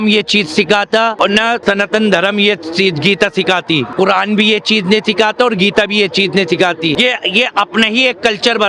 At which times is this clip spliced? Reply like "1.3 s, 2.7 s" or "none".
1.5 s, 3.9 s, 7.0 s

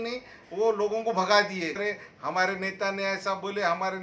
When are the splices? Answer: 1.8 s

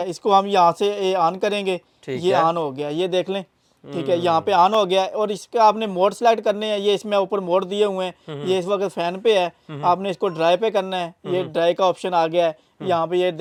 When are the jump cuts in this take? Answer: none

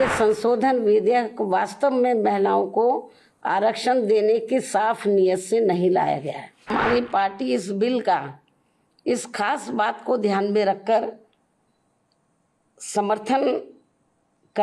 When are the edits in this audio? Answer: 6.7 s

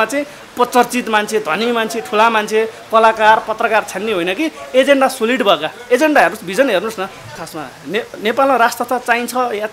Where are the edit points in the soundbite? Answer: 7.5 s

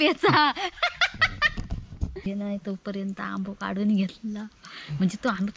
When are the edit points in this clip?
2.3 s

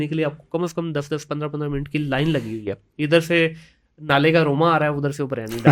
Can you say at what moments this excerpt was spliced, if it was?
none

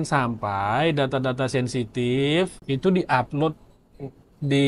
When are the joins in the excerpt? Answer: 2.6 s

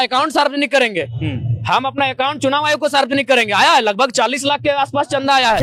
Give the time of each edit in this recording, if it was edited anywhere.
none

